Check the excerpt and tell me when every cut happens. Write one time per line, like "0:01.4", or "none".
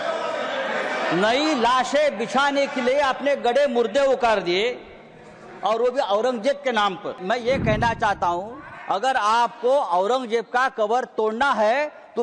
0:07.2